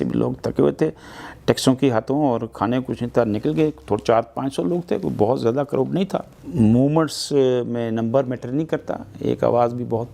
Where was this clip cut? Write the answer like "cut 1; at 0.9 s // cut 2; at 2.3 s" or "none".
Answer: cut 1; at 6.4 s